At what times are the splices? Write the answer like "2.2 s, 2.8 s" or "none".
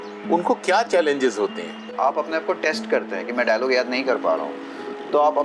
1.9 s